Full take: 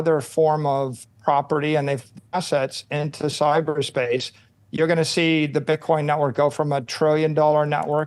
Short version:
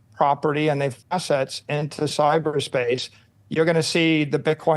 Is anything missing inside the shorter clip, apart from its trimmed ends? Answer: yes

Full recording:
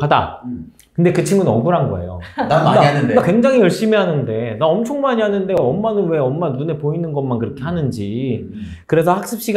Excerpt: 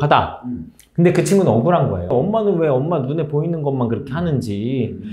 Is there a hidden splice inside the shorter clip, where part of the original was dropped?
yes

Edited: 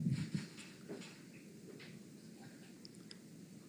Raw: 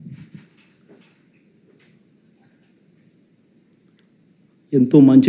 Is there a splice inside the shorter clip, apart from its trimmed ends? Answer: yes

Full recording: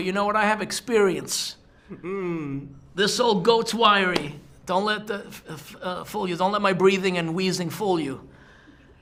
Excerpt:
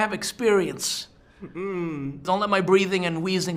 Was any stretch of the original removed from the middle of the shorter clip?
yes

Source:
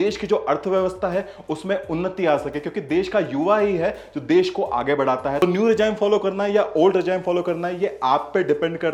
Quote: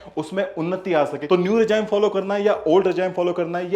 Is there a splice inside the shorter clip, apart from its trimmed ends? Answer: yes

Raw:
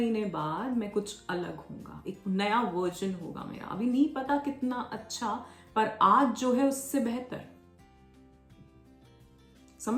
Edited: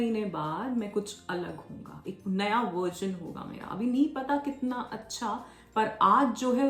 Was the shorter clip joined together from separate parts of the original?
no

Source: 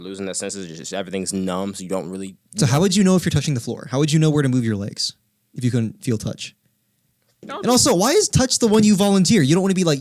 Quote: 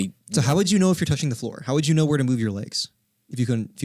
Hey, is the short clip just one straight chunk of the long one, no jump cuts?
yes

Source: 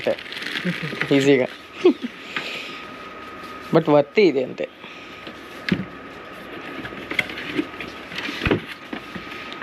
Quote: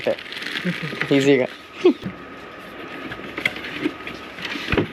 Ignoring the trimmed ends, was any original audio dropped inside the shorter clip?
yes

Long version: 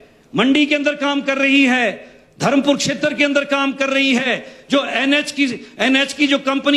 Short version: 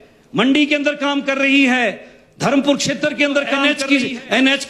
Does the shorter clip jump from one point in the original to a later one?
yes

